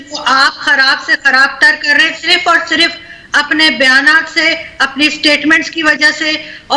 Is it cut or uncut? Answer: uncut